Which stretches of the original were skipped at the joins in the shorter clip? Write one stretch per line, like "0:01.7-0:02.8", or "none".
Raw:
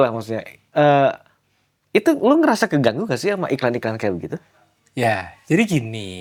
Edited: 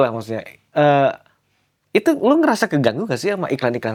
none